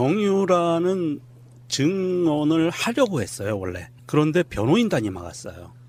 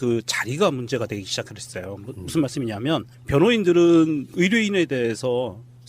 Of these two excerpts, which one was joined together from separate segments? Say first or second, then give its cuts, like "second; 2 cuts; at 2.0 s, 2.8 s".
second; 1 cut; at 3.2 s